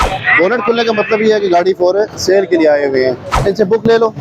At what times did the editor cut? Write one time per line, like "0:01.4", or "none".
0:03.3